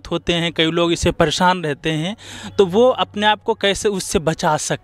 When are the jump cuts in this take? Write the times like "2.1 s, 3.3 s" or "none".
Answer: none